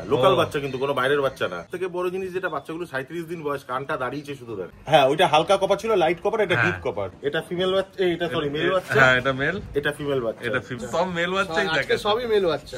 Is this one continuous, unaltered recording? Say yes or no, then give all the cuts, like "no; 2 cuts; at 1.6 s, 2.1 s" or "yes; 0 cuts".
no; 4 cuts; at 1.6 s, 4.7 s, 7.1 s, 10.8 s